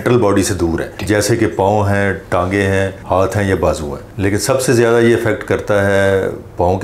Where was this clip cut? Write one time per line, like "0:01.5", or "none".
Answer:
none